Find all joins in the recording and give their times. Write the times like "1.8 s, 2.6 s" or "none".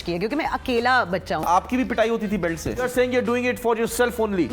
1.4 s, 3.0 s